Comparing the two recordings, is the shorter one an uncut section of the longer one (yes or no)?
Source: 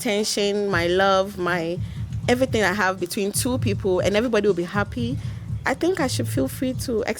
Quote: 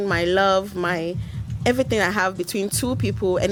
yes